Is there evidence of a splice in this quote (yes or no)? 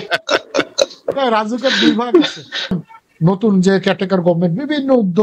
yes